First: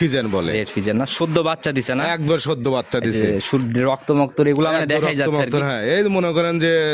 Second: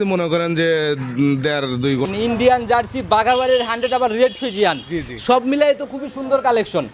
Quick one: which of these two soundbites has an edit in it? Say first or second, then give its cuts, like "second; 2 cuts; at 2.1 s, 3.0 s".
second; 1 cut; at 2.1 s